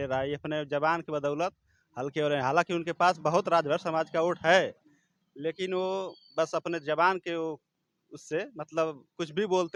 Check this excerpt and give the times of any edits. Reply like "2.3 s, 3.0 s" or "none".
none